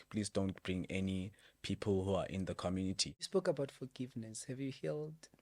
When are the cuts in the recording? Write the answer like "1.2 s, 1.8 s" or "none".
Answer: 3.3 s